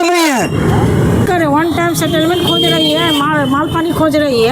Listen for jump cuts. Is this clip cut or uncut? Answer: cut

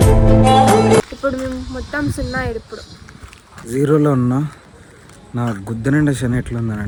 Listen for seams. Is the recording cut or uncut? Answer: uncut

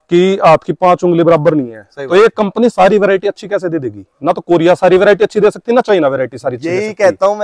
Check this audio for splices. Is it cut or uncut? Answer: uncut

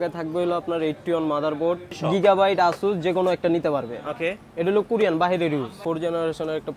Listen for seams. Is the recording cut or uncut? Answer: cut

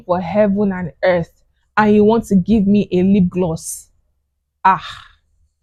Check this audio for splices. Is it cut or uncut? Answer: uncut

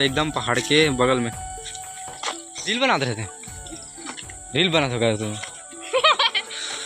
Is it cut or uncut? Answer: cut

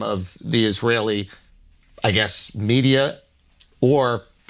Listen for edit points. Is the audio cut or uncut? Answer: uncut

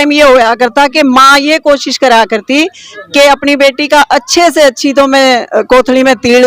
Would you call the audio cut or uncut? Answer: uncut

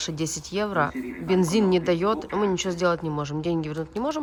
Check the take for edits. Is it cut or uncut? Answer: uncut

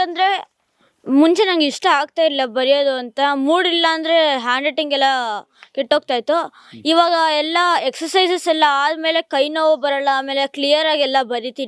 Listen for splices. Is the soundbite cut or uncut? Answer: uncut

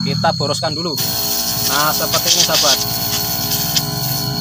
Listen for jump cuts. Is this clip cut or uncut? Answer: uncut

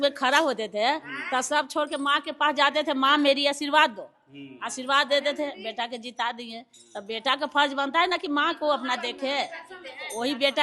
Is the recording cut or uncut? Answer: uncut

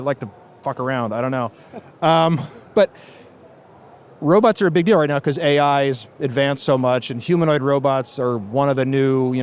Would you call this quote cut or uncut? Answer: uncut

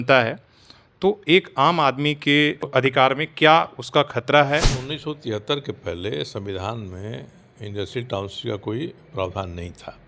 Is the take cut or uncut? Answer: cut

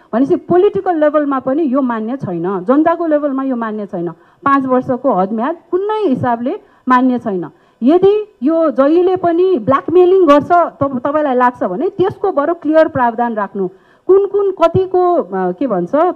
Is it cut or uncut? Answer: uncut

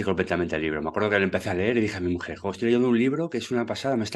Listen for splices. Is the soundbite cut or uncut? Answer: uncut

